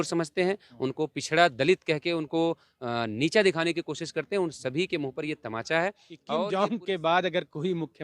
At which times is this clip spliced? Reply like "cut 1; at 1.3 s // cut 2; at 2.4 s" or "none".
cut 1; at 6.2 s

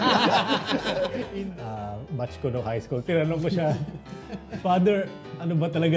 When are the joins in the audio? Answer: cut 1; at 1.3 s

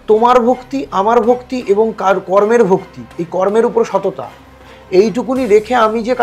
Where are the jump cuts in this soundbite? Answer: none

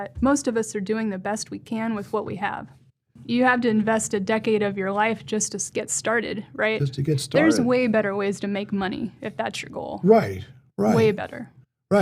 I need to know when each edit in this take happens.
cut 1; at 3.2 s

